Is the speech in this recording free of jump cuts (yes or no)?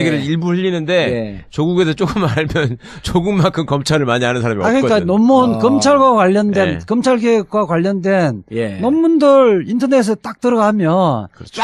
yes